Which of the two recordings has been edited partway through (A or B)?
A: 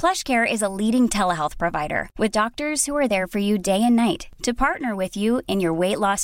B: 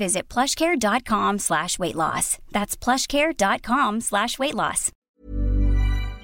B